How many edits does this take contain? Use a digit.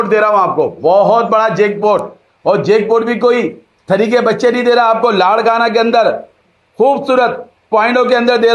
0